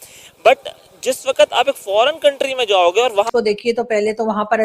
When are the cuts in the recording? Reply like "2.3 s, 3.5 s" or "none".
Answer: 3.3 s